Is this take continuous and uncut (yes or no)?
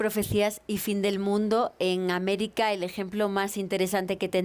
yes